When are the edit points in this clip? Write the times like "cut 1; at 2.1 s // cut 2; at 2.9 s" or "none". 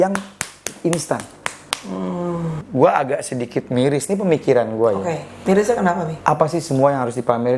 cut 1; at 2.6 s